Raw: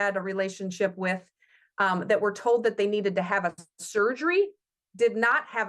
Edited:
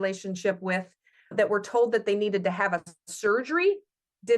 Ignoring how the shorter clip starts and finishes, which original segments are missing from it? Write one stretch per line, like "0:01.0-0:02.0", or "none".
0:01.7-0:02.0